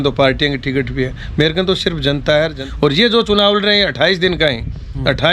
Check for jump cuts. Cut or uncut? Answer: cut